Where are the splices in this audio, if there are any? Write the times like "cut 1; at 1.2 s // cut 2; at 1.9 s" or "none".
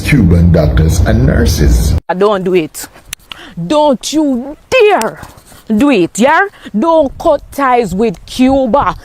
cut 1; at 2.0 s